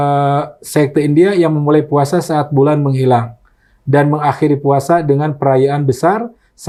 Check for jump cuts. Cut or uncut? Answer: uncut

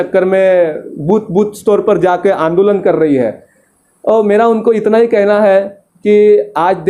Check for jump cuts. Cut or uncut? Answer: uncut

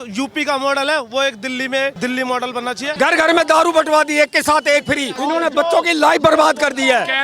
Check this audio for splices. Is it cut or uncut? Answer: cut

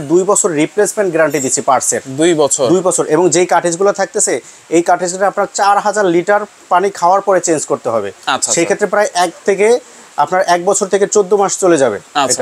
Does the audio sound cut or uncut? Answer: uncut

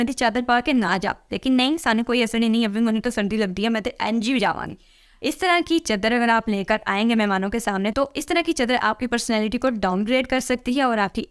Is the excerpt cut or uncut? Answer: uncut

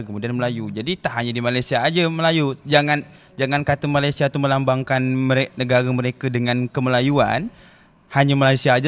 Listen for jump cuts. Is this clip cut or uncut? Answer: uncut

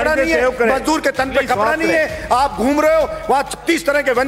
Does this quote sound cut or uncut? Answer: uncut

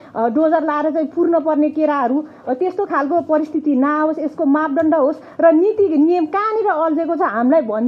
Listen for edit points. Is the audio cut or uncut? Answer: uncut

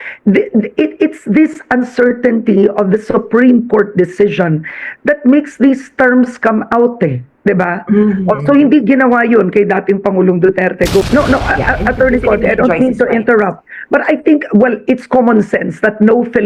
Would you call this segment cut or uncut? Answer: cut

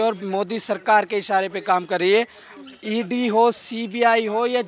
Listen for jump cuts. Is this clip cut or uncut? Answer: uncut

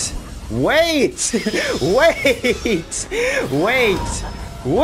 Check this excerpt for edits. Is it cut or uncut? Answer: uncut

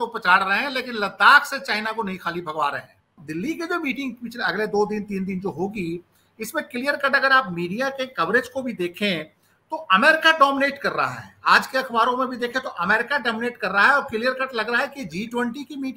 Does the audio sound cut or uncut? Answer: cut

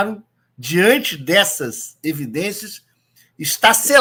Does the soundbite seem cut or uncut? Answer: uncut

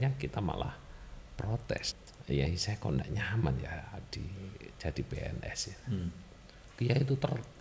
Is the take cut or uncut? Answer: cut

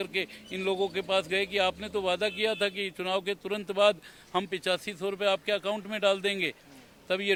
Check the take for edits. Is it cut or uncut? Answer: uncut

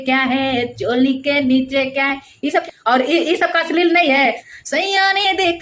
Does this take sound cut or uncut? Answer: cut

